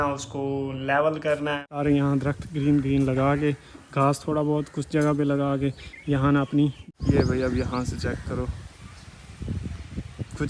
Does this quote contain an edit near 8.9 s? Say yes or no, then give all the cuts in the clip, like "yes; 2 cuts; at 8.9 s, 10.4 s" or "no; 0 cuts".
no; 2 cuts; at 1.6 s, 6.8 s